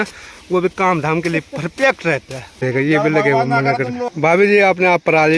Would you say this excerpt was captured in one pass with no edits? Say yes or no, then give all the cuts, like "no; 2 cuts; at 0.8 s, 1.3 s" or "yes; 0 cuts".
no; 2 cuts; at 2.6 s, 4.0 s